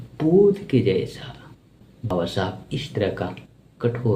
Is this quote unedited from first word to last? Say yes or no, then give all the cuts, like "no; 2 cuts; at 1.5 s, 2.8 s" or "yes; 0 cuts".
no; 1 cut; at 2.1 s